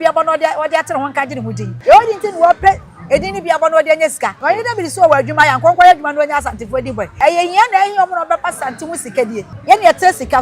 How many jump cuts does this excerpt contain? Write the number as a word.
four